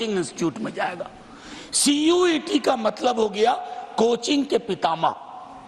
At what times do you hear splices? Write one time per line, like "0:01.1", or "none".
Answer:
none

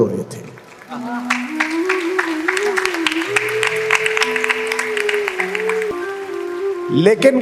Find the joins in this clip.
0:05.9

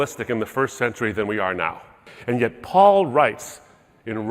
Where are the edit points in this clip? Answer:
0:02.1

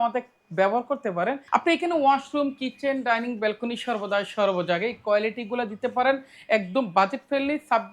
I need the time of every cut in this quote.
0:01.4

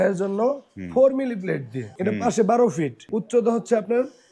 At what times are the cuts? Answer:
0:01.9
0:03.0

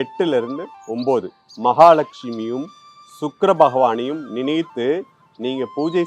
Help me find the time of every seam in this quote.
0:01.4

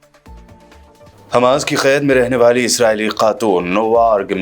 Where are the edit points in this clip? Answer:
0:01.1

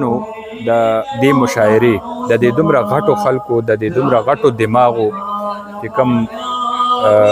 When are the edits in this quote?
0:01.1

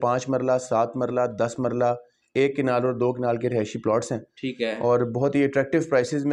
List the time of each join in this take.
none

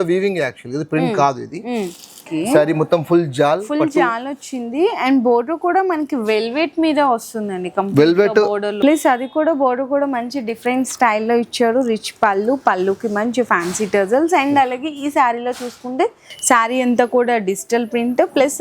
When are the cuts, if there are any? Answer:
0:02.2
0:08.7
0:16.3

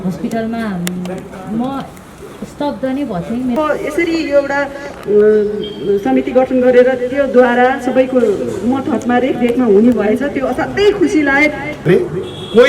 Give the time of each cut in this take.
0:03.6
0:11.8

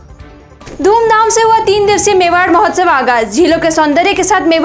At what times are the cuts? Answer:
none

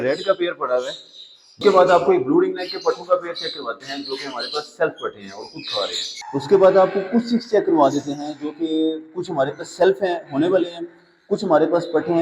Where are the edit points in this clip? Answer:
0:01.6
0:06.2

